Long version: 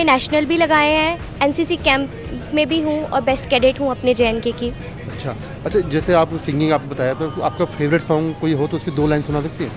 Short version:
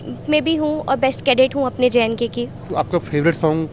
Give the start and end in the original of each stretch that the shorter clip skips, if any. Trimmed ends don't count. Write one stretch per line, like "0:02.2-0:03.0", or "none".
0:04.9-0:07.3